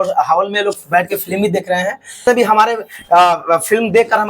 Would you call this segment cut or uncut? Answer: cut